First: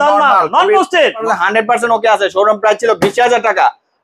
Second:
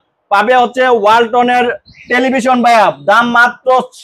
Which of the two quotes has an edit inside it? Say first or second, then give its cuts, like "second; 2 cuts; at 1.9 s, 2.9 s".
first; 1 cut; at 1.2 s